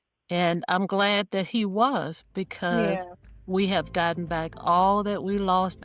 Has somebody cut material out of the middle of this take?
no; 0 cuts

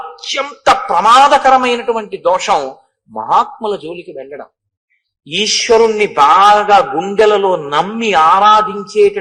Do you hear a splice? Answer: no; 0 cuts

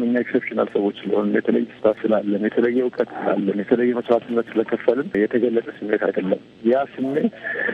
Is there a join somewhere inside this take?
yes; 3 cuts; at 1.8 s, 5.1 s, 6.5 s

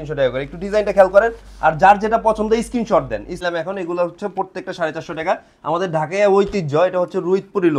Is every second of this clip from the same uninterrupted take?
no; 1 cut; at 3.4 s

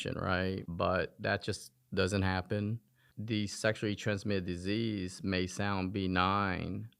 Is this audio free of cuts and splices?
no; 1 cut; at 3.1 s

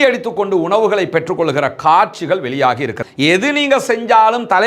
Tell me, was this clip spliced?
yes; 1 cut; at 3.0 s

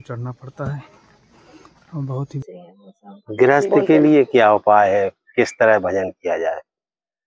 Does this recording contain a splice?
yes; 1 cut; at 2.4 s

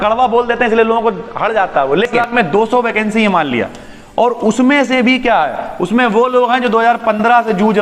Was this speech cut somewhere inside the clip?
yes; 1 cut; at 2.3 s

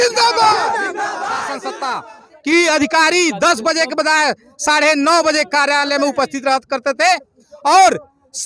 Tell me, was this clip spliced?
yes; 1 cut; at 1.6 s

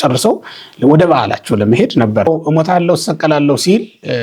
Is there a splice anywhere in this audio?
yes; 1 cut; at 2.2 s

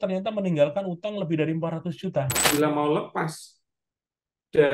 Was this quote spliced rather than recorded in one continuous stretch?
yes; 1 cut; at 2.5 s

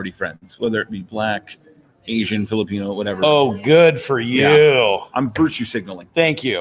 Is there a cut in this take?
no; 0 cuts

